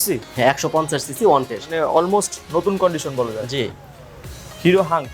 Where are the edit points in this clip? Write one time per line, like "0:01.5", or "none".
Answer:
0:01.7